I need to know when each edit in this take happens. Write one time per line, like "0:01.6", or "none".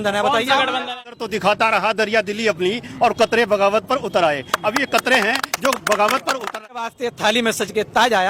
0:01.1
0:06.9